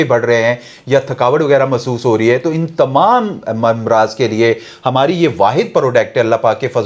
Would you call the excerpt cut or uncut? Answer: uncut